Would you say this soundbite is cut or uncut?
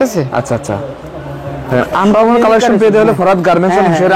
uncut